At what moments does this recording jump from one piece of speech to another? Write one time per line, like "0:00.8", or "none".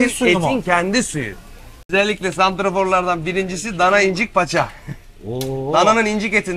0:01.9

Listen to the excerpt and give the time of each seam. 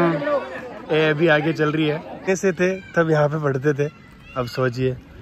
0:02.1

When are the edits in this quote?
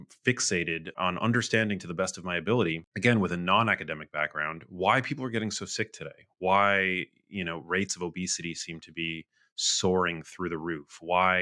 0:01.0
0:02.9

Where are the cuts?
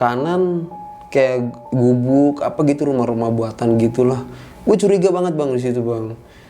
0:01.6

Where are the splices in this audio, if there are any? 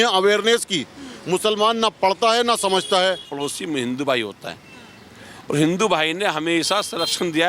0:03.3

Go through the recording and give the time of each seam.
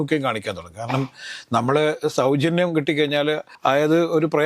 0:03.5

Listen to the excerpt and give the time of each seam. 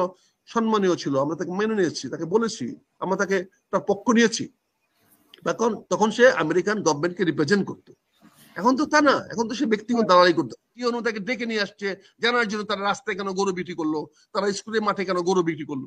0:10.7

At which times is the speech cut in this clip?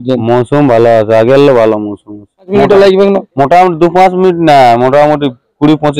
0:02.5

